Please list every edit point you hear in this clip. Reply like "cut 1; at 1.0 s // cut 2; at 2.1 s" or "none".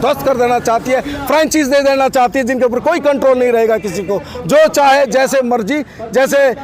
none